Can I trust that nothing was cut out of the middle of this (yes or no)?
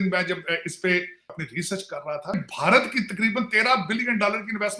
no